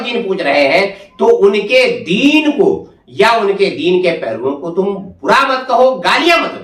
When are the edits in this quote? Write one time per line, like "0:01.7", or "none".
none